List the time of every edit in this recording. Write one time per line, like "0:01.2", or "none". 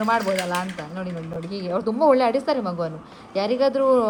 none